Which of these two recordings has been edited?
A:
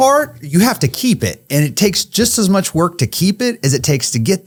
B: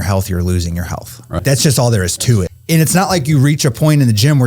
B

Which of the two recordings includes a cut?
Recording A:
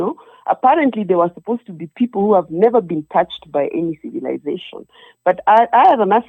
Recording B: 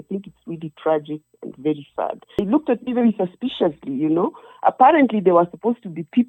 B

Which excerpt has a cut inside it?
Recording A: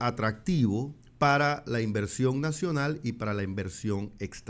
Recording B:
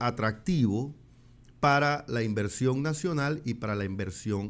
A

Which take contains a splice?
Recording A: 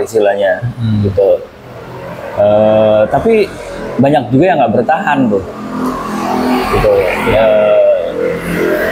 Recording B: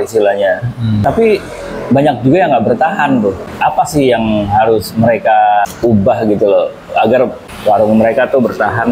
B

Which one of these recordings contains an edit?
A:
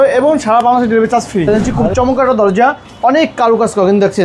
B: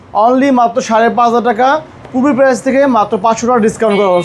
A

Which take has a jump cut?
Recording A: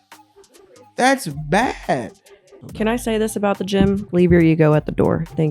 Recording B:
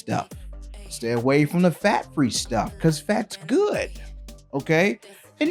A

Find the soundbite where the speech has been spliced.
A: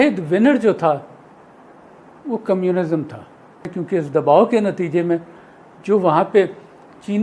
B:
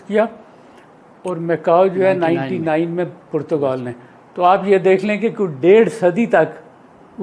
A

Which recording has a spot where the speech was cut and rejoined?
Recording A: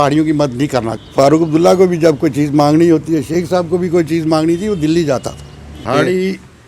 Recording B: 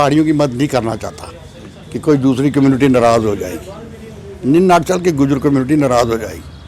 A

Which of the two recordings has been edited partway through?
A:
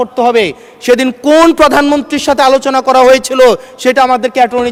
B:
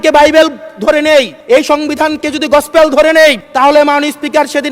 B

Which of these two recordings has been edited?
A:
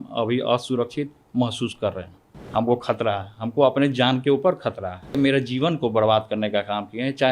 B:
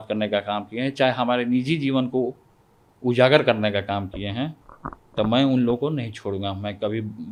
A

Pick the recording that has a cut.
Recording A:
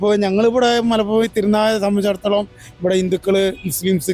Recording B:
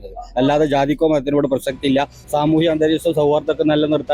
B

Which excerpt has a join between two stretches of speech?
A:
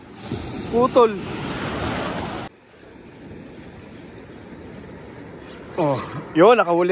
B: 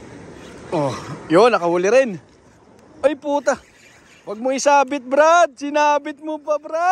A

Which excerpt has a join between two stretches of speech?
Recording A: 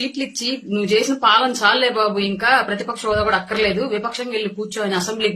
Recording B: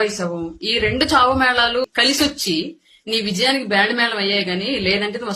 B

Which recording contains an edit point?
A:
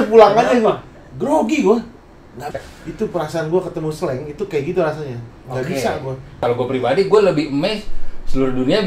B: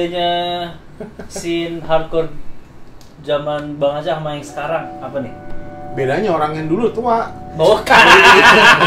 A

